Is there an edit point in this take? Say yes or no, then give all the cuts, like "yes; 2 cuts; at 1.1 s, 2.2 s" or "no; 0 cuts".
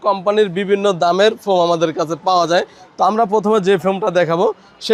no; 0 cuts